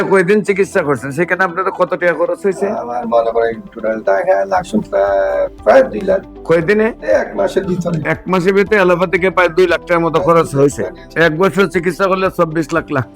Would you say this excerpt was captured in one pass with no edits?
yes; 0 cuts

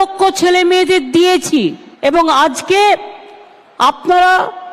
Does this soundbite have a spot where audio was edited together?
yes; 1 cut; at 1.9 s

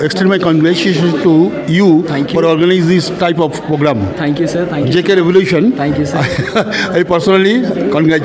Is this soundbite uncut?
yes; 0 cuts

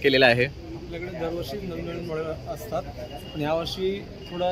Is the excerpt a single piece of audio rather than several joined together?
yes; 0 cuts

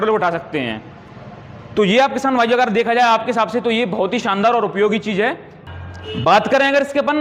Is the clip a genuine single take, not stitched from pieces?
no; 1 cut; at 5.5 s

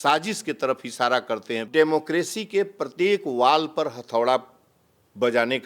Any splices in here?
yes; 1 cut; at 1.7 s

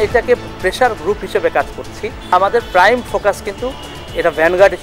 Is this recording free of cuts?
no; 1 cut; at 2.3 s

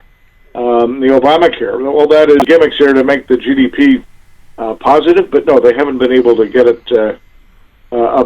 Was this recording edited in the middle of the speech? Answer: yes; 1 cut; at 2.4 s

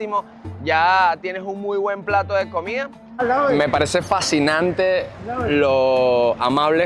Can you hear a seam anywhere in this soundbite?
yes; 1 cut; at 3.0 s

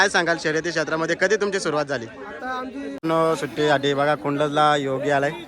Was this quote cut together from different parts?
yes; 1 cut; at 3.0 s

